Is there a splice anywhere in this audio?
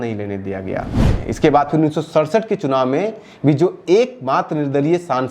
yes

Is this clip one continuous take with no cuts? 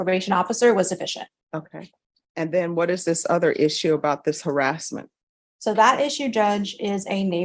no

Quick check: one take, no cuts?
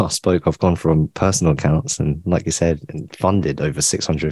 yes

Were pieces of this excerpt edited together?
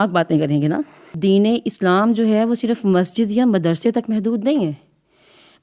yes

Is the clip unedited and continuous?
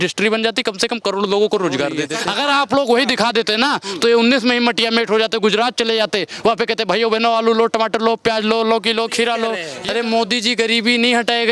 no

